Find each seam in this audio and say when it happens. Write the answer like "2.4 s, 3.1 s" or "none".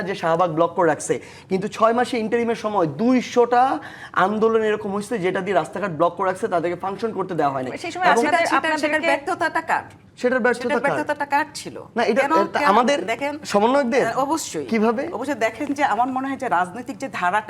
none